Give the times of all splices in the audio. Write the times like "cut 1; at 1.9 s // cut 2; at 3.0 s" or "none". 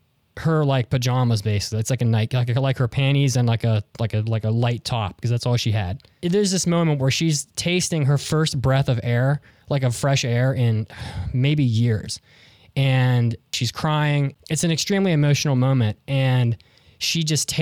cut 1; at 6.0 s // cut 2; at 13.5 s // cut 3; at 14.4 s